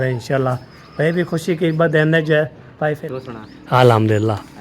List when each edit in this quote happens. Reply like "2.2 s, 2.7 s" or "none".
2.7 s